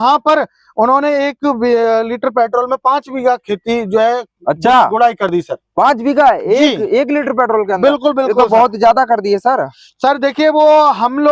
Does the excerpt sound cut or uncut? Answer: uncut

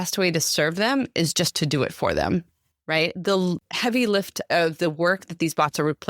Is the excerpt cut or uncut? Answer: cut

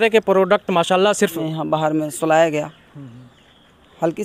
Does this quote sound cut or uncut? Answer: cut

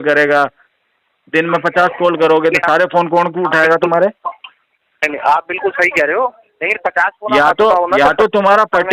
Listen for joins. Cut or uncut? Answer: uncut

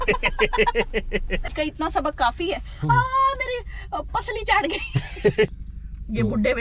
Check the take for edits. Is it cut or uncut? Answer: cut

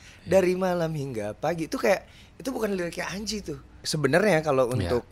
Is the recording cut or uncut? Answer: cut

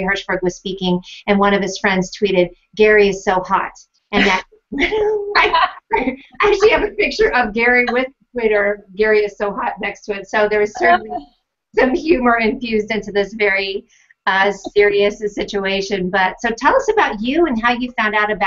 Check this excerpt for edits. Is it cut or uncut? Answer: uncut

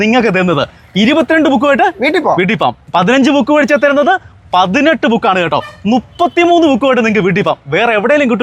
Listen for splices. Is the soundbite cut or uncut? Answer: uncut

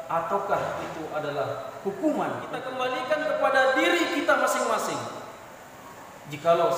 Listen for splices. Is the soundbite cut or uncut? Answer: cut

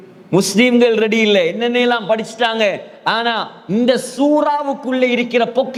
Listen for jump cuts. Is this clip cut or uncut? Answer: uncut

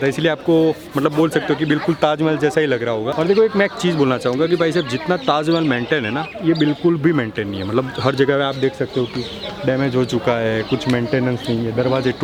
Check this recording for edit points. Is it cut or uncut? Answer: uncut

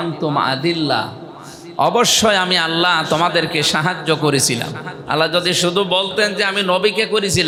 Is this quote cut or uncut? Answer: uncut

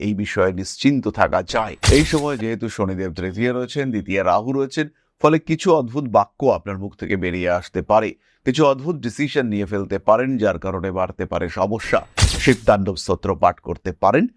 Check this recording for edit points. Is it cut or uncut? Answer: cut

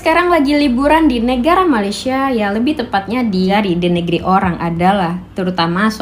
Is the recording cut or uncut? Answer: cut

